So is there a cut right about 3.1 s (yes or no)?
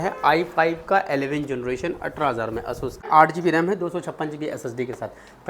yes